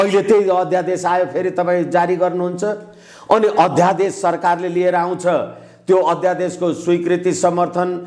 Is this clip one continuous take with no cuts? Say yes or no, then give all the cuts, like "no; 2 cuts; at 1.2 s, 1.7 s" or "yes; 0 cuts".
yes; 0 cuts